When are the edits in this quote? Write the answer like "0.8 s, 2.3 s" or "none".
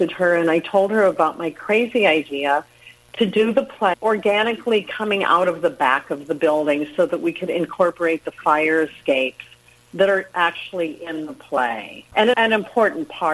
12.3 s